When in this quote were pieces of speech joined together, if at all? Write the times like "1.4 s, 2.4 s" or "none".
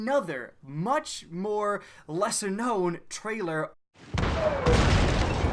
none